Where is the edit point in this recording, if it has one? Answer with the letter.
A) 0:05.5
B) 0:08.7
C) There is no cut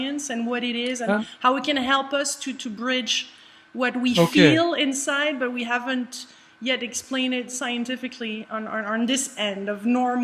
B